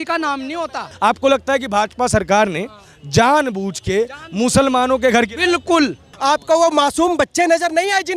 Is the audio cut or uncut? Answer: cut